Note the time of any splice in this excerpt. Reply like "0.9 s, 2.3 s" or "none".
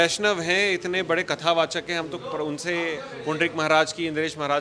none